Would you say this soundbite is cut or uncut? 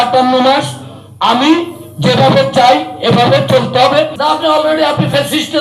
cut